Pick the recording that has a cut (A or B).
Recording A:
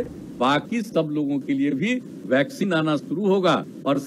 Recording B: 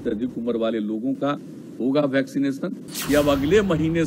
B